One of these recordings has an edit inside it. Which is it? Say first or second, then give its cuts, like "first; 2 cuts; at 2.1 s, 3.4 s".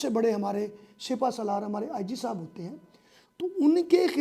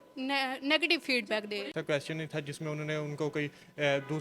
second; 1 cut; at 1.8 s